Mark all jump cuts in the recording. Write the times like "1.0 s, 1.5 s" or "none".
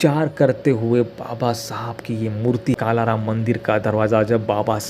2.8 s